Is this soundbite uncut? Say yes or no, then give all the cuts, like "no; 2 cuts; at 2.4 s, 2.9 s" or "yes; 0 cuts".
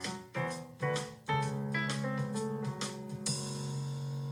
yes; 0 cuts